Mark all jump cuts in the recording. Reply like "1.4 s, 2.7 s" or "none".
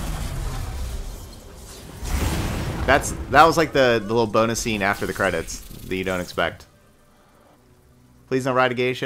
7.6 s